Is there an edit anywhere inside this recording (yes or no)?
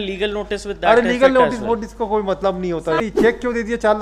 yes